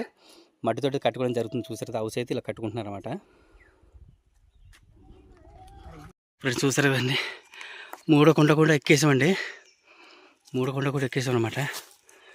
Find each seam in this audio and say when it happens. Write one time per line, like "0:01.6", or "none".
0:06.3